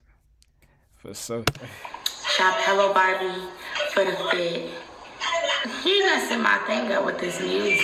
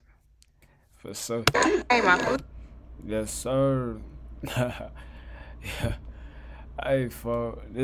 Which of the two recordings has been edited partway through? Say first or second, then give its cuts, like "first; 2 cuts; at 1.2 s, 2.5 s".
second; 1 cut; at 1.5 s